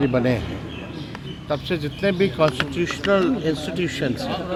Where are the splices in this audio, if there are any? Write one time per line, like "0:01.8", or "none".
none